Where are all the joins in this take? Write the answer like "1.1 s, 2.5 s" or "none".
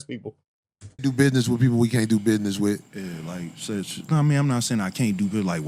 none